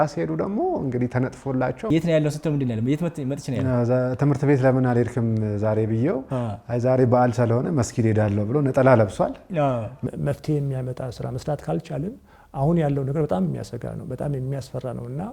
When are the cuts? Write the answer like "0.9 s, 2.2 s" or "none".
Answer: 1.9 s, 9.9 s